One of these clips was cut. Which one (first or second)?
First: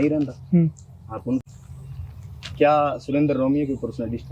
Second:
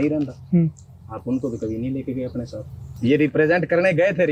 first